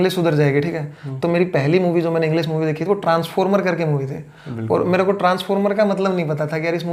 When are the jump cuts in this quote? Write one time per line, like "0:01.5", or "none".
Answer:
none